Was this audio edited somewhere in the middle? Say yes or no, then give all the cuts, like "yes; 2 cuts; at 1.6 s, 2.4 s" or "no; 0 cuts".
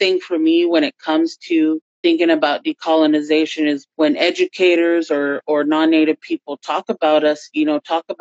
no; 0 cuts